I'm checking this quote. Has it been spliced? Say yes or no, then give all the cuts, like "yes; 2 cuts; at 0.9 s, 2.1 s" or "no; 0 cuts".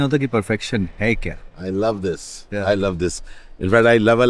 no; 0 cuts